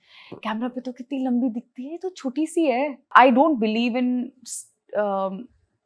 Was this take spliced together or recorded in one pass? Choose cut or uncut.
cut